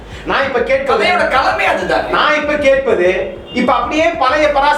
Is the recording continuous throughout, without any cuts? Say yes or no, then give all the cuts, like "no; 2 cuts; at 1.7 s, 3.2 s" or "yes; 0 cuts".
yes; 0 cuts